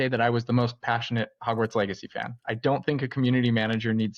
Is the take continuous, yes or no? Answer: yes